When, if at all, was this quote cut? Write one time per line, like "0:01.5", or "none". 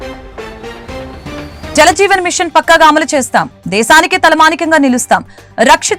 none

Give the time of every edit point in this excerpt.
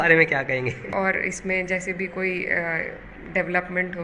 0:00.9

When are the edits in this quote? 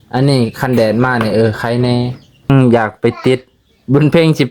0:02.5

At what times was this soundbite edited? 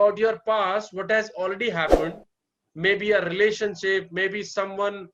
none

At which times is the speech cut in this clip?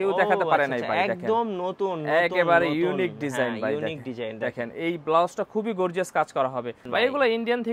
0:06.8

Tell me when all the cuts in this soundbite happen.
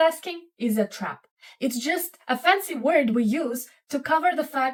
none

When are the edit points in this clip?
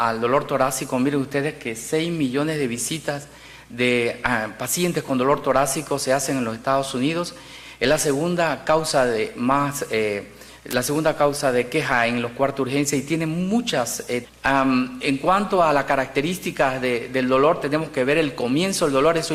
none

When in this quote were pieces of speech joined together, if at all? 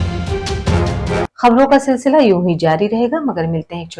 0:01.3

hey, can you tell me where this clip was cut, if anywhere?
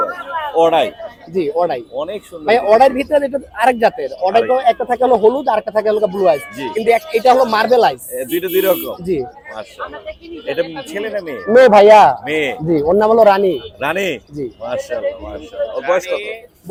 none

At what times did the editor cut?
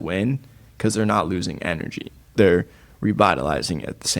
0:02.3

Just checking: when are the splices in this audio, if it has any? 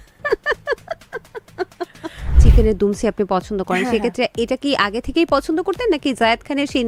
0:02.4

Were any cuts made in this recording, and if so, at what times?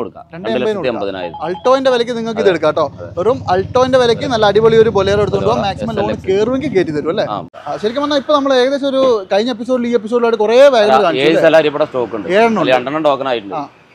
0:07.5

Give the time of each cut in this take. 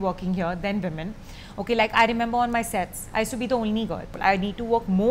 0:04.2

